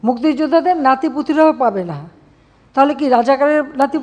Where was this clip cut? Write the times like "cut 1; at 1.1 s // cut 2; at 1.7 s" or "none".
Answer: none